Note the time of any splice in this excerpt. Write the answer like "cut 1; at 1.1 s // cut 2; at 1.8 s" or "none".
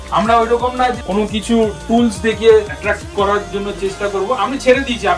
cut 1; at 1.0 s // cut 2; at 2.7 s